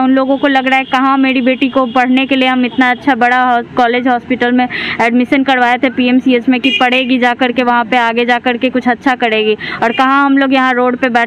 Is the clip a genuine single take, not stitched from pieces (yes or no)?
yes